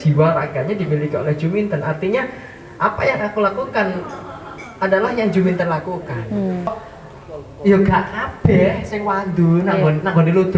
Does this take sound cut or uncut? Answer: cut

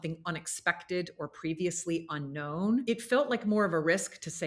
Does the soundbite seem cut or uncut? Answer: cut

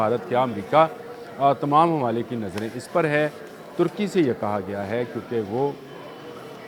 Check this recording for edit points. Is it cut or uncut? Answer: uncut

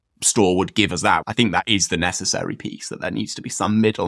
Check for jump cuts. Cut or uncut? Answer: cut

